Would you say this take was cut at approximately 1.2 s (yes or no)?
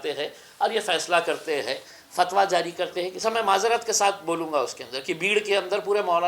no